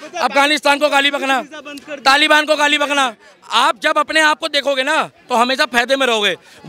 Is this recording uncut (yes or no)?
yes